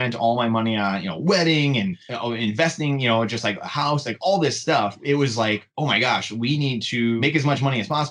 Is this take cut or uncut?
cut